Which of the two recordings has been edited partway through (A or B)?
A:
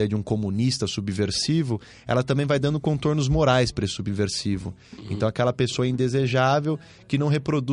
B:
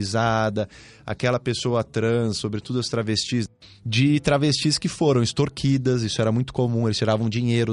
B